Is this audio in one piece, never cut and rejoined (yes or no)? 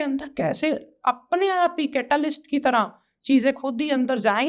yes